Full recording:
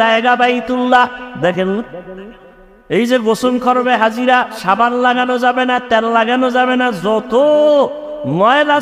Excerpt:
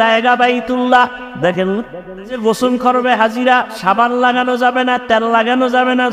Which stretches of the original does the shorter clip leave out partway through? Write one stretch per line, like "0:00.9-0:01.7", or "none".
0:02.4-0:03.2